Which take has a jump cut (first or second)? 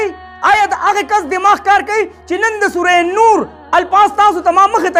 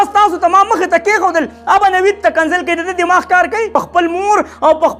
second